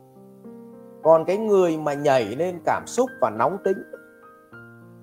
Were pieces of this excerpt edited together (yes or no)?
yes